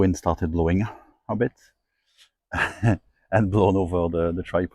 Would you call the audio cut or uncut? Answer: uncut